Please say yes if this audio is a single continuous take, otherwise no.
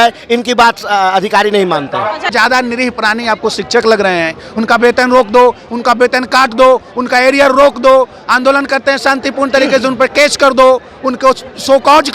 no